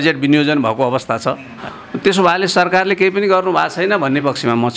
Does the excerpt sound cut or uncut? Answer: cut